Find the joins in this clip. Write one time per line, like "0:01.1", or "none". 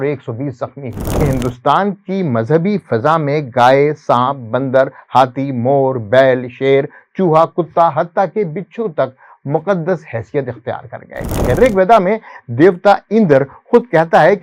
0:01.2
0:11.3